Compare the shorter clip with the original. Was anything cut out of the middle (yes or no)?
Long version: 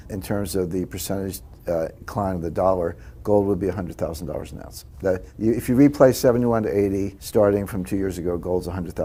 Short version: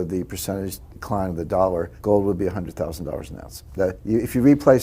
yes